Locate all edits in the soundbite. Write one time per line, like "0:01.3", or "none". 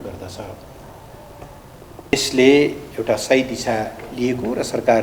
0:02.1